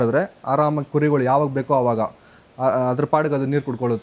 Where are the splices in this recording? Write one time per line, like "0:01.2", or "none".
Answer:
none